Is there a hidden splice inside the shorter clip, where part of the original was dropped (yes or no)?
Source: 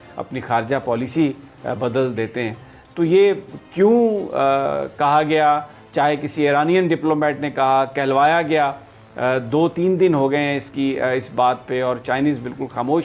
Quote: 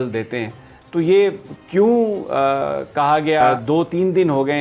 yes